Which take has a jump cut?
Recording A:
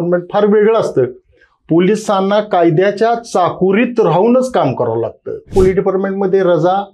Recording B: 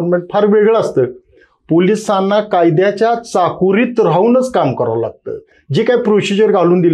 A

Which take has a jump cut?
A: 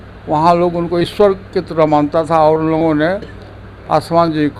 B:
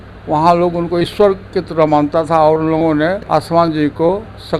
B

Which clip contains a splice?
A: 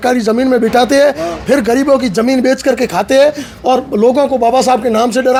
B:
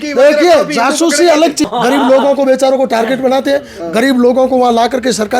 B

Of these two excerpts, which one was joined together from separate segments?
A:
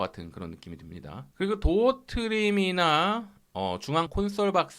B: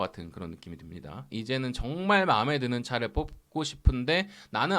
B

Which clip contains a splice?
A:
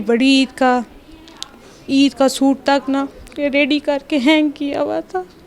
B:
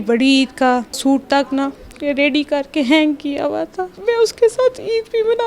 B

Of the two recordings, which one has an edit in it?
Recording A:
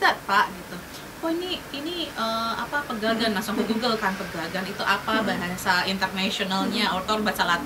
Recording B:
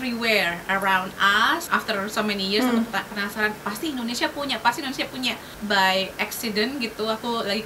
B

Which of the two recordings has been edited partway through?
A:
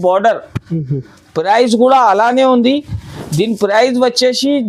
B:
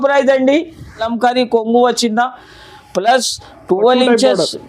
B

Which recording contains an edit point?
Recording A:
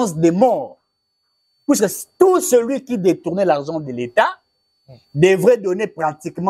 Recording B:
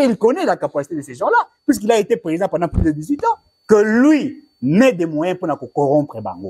B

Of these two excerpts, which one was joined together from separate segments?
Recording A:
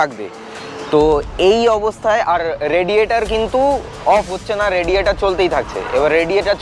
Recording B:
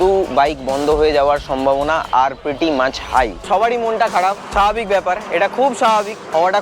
B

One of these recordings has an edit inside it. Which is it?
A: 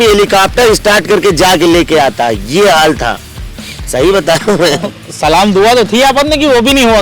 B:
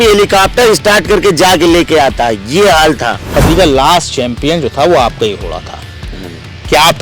B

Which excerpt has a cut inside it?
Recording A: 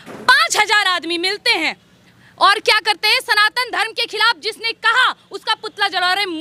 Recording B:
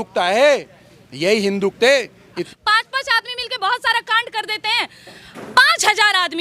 B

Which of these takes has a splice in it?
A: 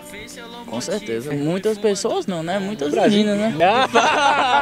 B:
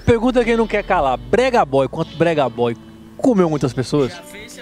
A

